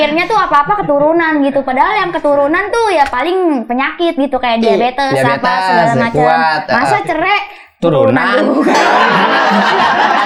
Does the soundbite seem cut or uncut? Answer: uncut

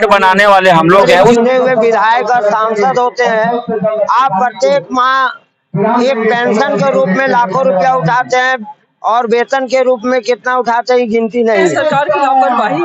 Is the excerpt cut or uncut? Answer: cut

